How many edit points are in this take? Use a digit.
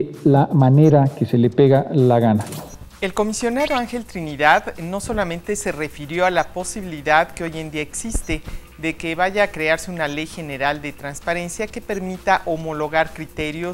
0